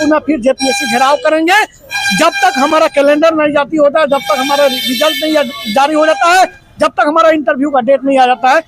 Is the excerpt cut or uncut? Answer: uncut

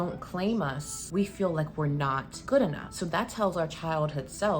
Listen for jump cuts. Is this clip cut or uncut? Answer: cut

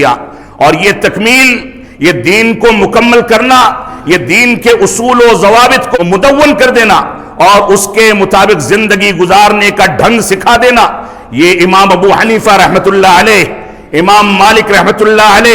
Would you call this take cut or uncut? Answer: cut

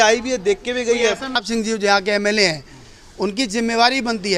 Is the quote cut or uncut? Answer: cut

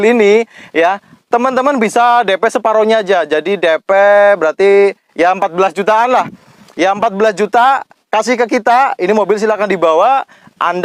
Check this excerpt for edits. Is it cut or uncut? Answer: uncut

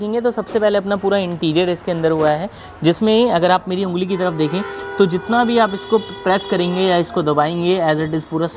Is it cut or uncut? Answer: uncut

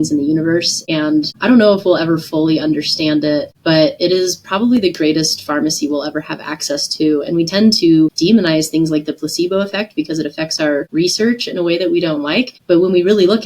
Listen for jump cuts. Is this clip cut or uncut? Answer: cut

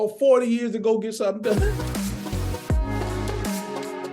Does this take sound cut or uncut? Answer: cut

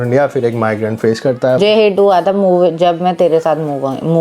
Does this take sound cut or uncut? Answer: cut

